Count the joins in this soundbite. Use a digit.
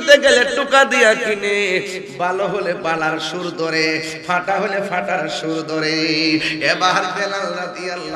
0